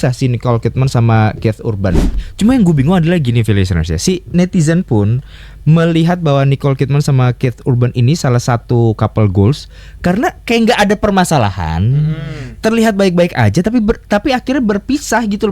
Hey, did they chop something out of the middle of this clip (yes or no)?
yes